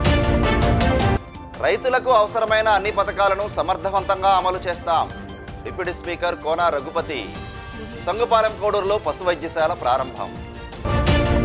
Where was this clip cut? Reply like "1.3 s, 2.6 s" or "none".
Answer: 1.1 s